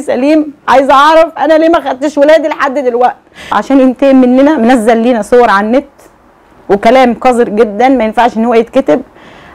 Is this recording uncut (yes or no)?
no